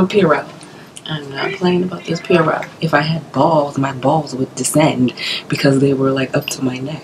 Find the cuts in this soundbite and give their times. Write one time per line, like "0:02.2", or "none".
0:02.7